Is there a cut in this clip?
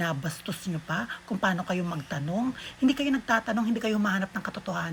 no; 0 cuts

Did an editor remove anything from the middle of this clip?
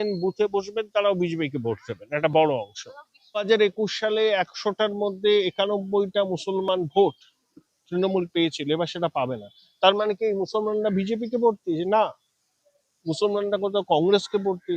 yes; 1 cut; at 3.4 s

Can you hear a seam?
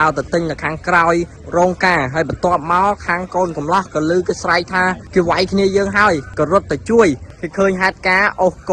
yes; 4 cuts; at 1.4 s, 5.0 s, 6.3 s, 7.3 s

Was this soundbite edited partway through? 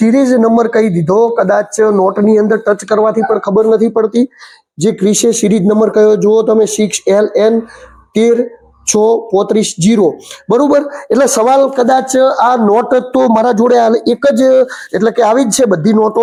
no; 0 cuts

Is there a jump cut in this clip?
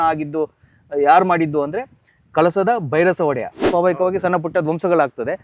yes; 1 cut; at 3.6 s

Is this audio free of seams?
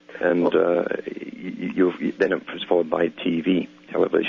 no; 1 cut; at 2.1 s

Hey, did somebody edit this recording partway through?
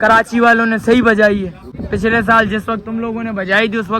yes; 1 cut; at 1.7 s

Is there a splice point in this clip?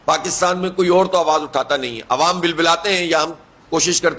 no; 0 cuts

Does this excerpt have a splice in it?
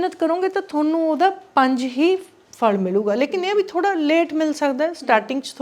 no; 0 cuts

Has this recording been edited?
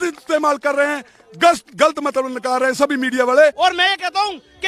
yes; 1 cut; at 3.6 s

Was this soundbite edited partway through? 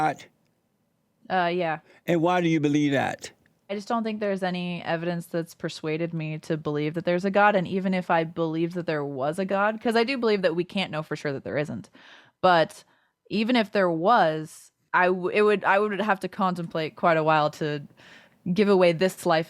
yes; 1 cut; at 3.8 s

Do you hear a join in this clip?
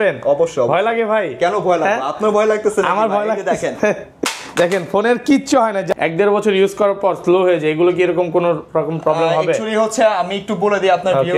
yes; 1 cut; at 5.8 s

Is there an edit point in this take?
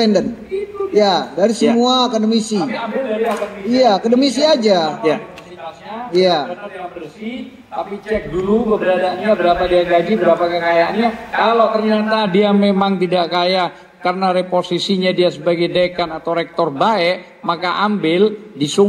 no; 0 cuts

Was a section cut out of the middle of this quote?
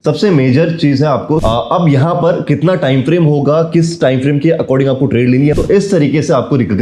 yes; 2 cuts; at 1.4 s, 5.5 s

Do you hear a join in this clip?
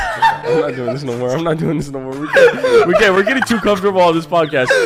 no; 0 cuts

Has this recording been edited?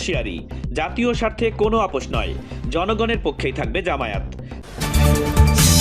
yes; 1 cut; at 4.5 s

